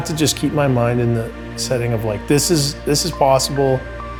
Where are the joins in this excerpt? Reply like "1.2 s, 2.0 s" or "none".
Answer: none